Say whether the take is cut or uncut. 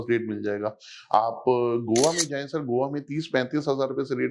uncut